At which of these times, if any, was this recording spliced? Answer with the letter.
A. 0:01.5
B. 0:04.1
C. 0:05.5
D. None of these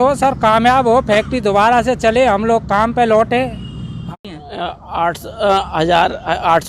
B